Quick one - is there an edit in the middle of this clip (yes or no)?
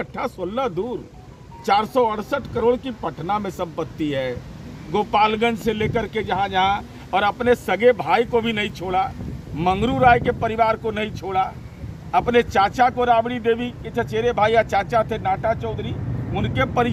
no